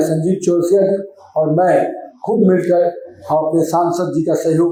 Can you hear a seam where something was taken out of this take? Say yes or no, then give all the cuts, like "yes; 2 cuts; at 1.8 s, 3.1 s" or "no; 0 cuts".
no; 0 cuts